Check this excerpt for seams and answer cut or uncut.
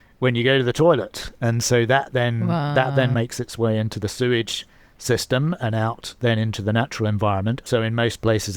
cut